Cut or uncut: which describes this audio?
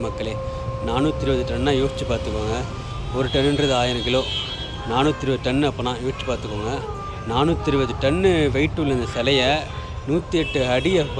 uncut